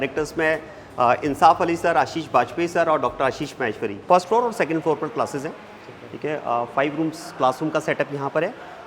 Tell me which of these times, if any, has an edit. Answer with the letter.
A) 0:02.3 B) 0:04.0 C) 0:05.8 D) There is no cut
B